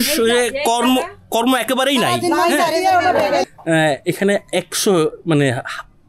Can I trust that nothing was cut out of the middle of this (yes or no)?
no